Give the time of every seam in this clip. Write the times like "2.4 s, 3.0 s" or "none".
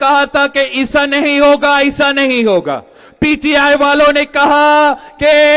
none